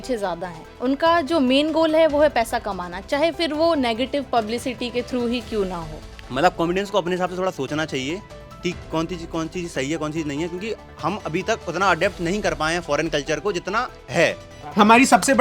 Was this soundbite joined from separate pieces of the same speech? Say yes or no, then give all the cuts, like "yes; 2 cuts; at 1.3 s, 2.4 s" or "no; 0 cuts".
yes; 2 cuts; at 6.1 s, 14.5 s